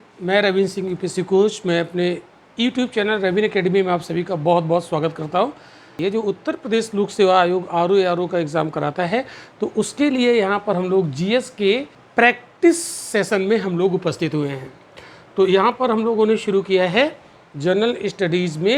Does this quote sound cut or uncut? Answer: cut